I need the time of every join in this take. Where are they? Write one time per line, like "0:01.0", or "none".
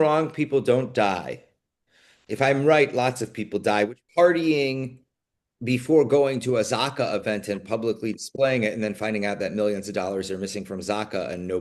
0:04.0